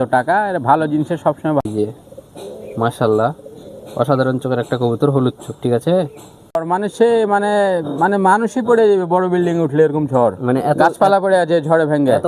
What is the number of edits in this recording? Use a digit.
2